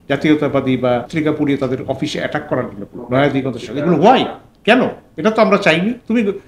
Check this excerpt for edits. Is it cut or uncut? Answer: cut